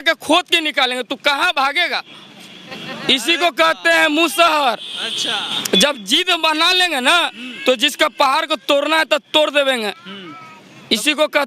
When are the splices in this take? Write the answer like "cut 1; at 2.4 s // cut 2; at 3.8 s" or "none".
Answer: none

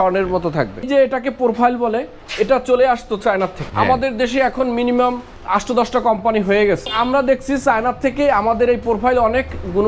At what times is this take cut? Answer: cut 1; at 0.8 s // cut 2; at 2.2 s // cut 3; at 3.6 s // cut 4; at 5.3 s // cut 5; at 6.9 s

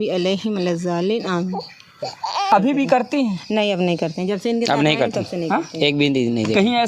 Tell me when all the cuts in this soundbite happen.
cut 1; at 2.5 s

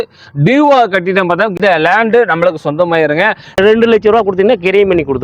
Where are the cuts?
cut 1; at 1.5 s // cut 2; at 3.6 s

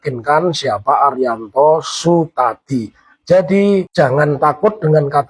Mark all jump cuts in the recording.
cut 1; at 3.9 s

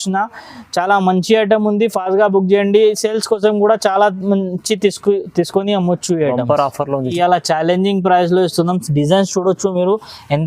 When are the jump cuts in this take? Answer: cut 1; at 7.1 s

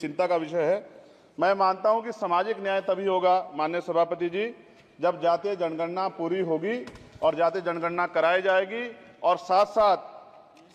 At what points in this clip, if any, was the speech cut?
none

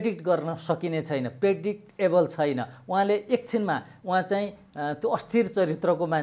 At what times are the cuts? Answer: none

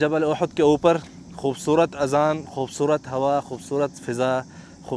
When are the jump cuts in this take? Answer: none

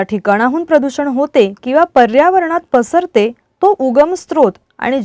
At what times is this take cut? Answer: cut 1; at 3.4 s

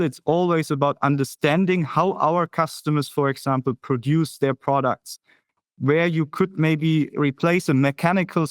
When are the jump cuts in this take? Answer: cut 1; at 7.1 s

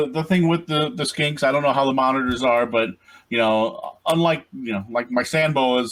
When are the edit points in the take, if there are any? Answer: none

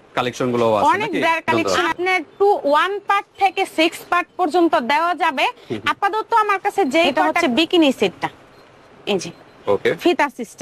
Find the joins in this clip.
cut 1; at 1.7 s // cut 2; at 7.3 s

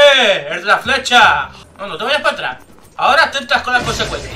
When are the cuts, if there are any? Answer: cut 1; at 1.6 s

